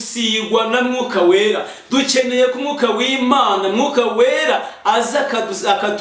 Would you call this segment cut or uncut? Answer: uncut